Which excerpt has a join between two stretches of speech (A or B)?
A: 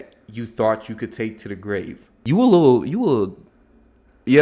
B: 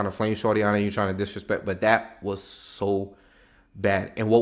A